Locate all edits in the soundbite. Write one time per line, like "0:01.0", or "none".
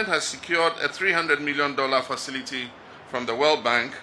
none